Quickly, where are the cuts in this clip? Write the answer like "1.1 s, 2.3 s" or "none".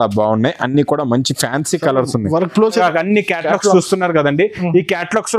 2.8 s